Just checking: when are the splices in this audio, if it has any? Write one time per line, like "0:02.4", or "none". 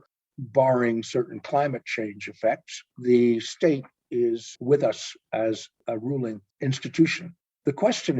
0:04.5
0:06.1

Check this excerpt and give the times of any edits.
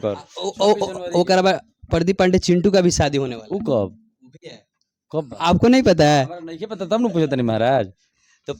none

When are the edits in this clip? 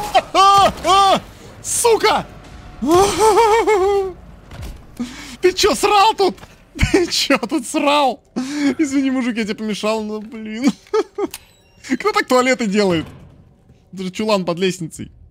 none

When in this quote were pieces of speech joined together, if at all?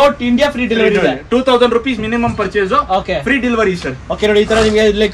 none

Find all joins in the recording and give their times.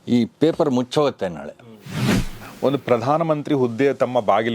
0:02.2

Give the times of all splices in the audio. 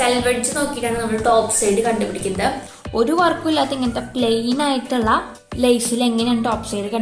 0:02.6
0:05.4

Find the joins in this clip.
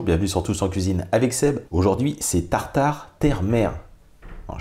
0:01.6

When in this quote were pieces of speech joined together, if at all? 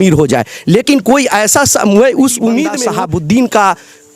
0:02.8

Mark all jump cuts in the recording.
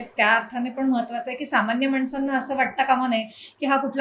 none

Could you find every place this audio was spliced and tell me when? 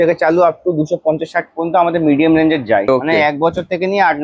0:02.9

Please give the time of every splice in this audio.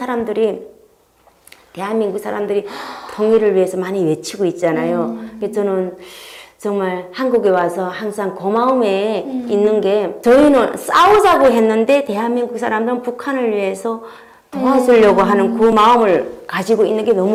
none

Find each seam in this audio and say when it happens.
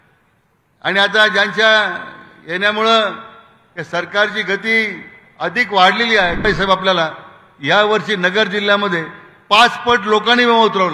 0:06.4

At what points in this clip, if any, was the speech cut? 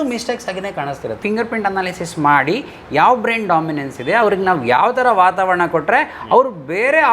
0:01.2

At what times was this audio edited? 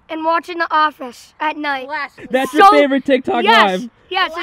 0:02.1

